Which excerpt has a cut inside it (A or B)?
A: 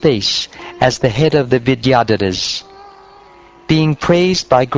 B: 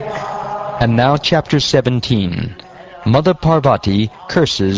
A